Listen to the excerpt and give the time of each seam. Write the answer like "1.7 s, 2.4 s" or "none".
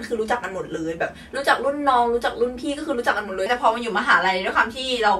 3.5 s